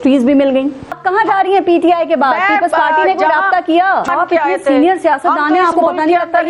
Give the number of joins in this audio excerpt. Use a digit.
2